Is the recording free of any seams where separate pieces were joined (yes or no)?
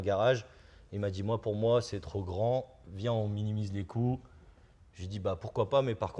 yes